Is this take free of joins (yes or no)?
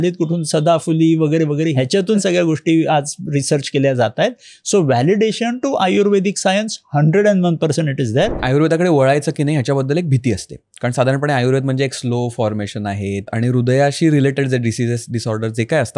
no